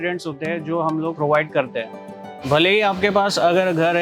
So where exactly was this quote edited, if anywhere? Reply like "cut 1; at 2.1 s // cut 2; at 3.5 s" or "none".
cut 1; at 1.1 s // cut 2; at 2.4 s